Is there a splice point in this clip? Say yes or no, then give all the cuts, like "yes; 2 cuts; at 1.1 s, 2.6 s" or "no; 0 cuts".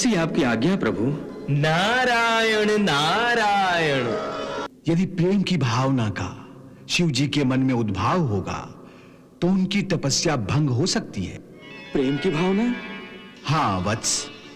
yes; 1 cut; at 4.6 s